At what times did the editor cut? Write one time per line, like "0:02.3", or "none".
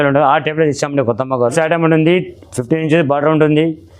0:01.5

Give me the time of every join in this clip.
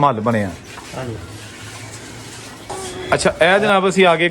0:02.7

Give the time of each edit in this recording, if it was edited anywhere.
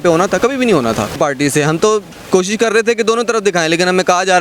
0:01.1

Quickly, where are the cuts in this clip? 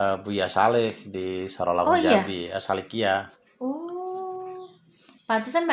none

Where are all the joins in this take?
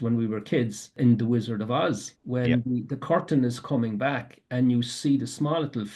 0:00.9
0:02.1

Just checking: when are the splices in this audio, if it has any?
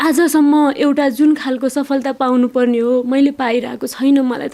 none

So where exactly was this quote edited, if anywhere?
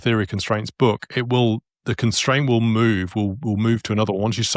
none

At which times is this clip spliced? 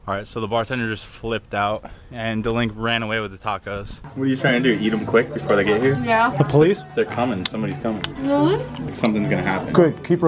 0:04.0
0:08.8

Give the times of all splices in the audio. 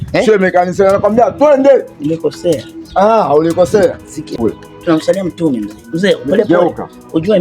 0:04.3

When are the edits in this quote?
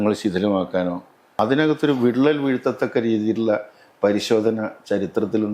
0:01.3

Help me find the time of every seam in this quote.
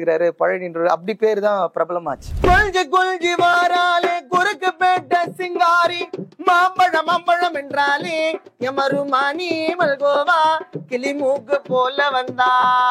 0:02.3

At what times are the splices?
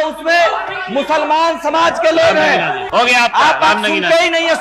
0:02.8

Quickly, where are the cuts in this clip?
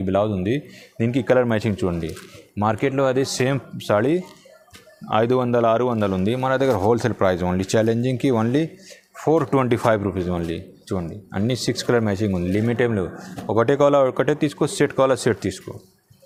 none

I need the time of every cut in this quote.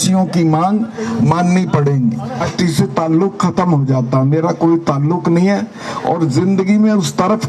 0:02.5

